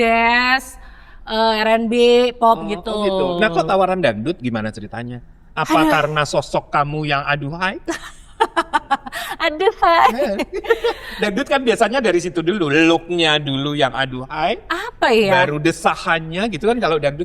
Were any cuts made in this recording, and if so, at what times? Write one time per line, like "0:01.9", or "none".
none